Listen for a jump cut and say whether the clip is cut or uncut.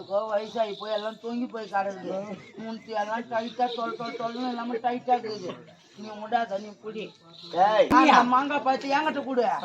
cut